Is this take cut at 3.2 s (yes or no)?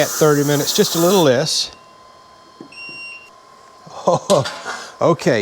yes